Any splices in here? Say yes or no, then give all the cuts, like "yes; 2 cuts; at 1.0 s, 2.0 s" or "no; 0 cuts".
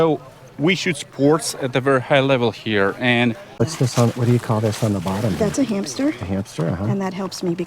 yes; 1 cut; at 3.6 s